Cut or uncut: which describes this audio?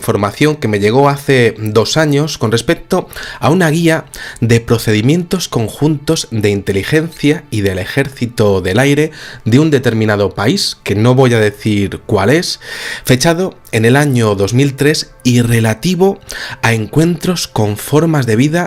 uncut